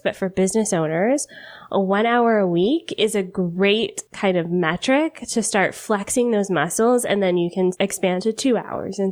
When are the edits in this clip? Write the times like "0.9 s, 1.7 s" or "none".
4.0 s, 7.8 s